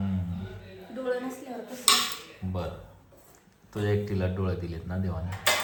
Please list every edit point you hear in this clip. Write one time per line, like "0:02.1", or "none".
none